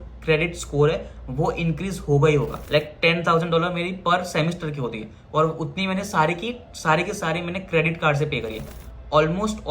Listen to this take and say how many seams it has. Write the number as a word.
two